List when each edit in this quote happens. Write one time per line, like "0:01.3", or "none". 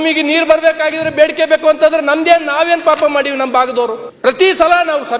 0:04.1